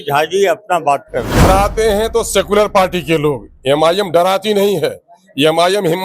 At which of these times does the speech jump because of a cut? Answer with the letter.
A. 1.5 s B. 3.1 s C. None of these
A